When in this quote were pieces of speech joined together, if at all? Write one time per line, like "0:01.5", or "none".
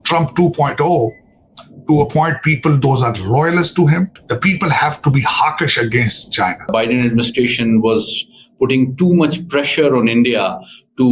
0:04.2
0:06.7